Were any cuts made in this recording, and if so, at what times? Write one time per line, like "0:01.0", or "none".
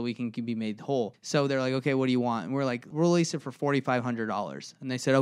0:01.2
0:02.9